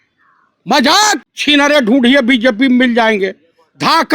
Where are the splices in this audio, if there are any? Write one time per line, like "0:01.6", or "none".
0:01.3

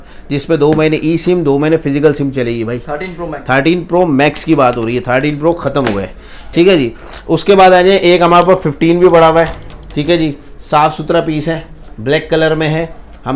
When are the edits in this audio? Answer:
none

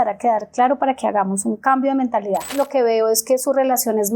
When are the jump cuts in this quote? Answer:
0:02.5

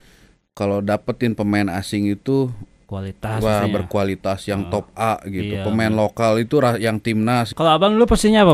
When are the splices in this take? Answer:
0:07.5

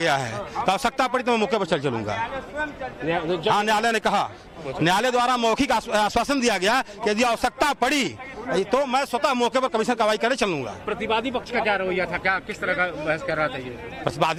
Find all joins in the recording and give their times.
none

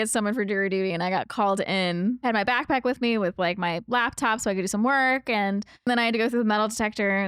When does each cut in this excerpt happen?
0:02.2
0:05.9

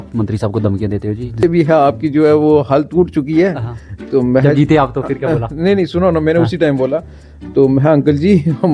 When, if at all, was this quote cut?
0:01.4

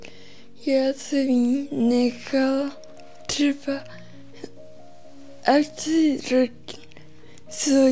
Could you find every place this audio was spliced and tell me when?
none

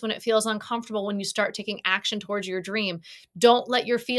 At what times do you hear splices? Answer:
none

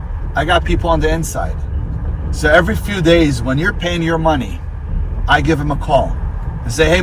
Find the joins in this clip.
none

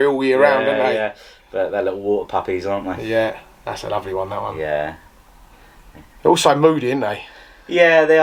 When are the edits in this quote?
none

